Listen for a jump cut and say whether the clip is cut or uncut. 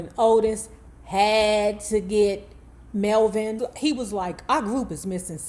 cut